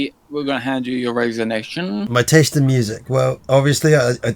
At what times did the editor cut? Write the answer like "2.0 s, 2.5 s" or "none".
2.1 s, 3.4 s